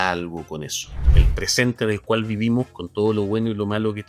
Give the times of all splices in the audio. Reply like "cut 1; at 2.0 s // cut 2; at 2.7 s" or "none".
cut 1; at 1.2 s